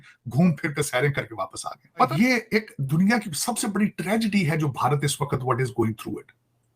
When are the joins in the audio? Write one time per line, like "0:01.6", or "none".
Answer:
0:02.1